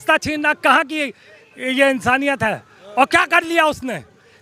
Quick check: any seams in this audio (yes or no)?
no